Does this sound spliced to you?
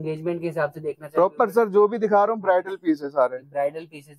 no; 0 cuts

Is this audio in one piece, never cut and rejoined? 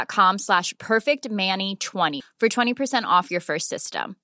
no; 1 cut; at 2.2 s

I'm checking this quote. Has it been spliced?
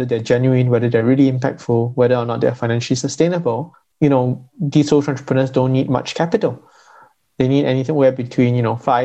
yes; 1 cut; at 3.8 s

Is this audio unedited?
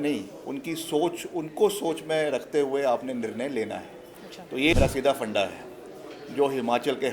no; 1 cut; at 4.7 s

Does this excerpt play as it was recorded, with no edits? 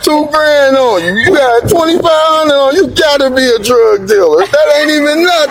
yes; 0 cuts

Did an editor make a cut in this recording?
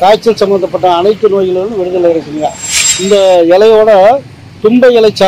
yes; 1 cut; at 2.8 s

